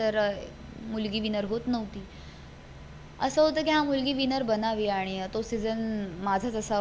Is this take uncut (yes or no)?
yes